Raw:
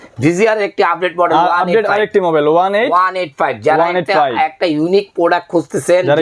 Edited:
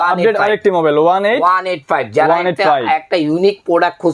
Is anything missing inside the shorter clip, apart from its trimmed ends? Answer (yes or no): no